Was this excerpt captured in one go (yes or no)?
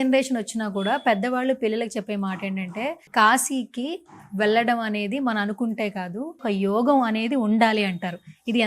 no